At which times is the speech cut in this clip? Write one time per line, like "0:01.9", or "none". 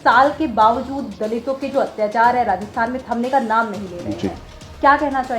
none